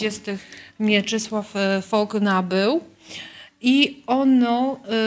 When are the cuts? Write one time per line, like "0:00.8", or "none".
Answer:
none